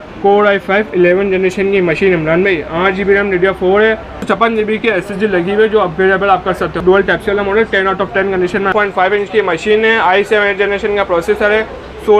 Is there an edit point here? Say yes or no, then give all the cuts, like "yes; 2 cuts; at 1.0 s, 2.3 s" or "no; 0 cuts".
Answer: yes; 3 cuts; at 4.2 s, 6.8 s, 8.7 s